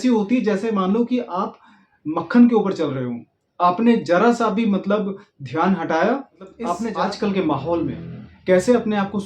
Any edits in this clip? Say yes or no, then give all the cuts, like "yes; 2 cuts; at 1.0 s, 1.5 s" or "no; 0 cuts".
yes; 1 cut; at 6.8 s